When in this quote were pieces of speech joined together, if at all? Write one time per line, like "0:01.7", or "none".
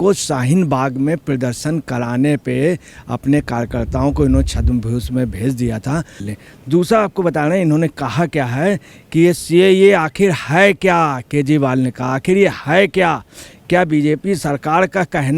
0:06.2